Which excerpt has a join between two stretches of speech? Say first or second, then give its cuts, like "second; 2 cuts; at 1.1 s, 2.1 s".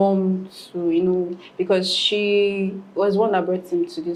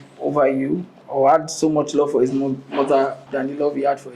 second; 2 cuts; at 1.0 s, 3.2 s